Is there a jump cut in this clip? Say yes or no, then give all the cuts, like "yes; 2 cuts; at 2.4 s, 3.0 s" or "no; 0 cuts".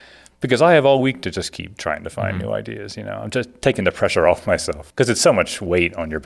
yes; 1 cut; at 4.8 s